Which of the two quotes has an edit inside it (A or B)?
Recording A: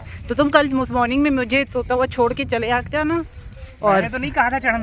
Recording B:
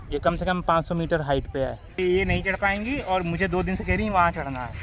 B